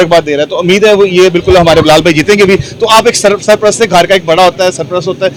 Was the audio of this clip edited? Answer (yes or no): no